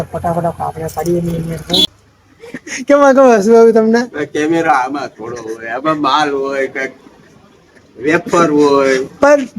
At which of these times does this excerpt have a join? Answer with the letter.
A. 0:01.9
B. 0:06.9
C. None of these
A